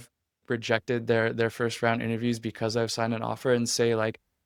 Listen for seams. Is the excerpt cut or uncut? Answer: uncut